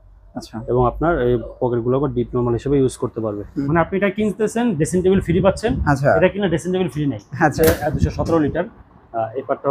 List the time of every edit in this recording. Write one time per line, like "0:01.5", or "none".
0:03.7
0:07.5

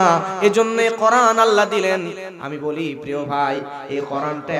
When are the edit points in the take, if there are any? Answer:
none

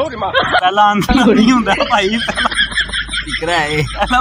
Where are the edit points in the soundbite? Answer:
none

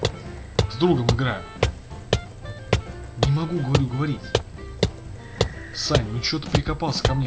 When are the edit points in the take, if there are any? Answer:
none

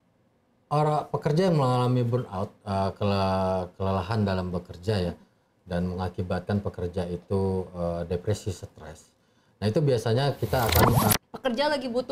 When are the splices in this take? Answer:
0:11.1

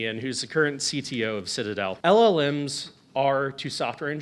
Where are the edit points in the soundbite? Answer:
0:02.0

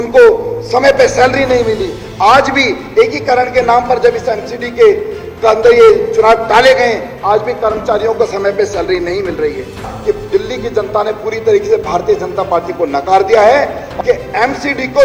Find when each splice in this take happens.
0:09.8
0:13.8

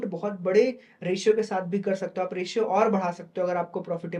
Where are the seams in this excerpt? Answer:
none

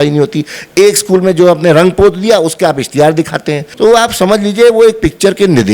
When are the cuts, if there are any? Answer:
0:03.6

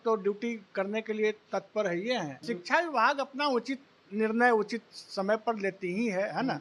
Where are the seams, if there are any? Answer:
0:02.4

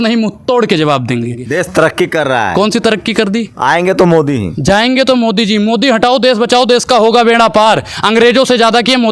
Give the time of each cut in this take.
0:01.4

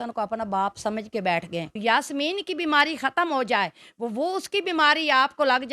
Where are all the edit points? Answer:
0:01.8

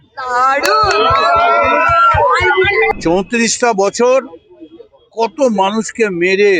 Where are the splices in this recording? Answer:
0:02.9

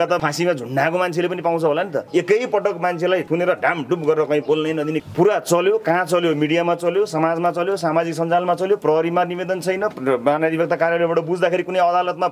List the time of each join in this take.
0:02.0
0:05.0

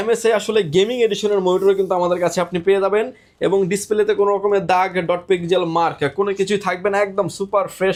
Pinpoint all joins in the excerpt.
none

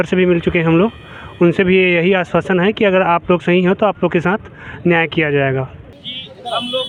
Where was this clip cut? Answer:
none

